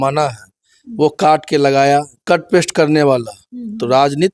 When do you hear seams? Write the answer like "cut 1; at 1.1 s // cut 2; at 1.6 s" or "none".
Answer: cut 1; at 2.1 s